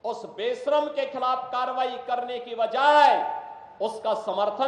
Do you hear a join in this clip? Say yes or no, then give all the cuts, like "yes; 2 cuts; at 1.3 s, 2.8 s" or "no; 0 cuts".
no; 0 cuts